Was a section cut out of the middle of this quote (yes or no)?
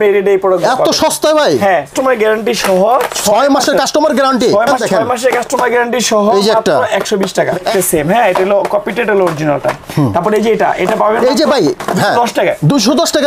yes